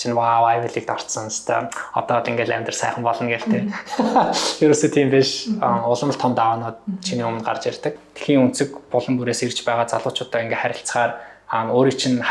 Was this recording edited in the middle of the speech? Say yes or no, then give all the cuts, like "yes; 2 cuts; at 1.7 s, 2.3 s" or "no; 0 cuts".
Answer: yes; 1 cut; at 8.1 s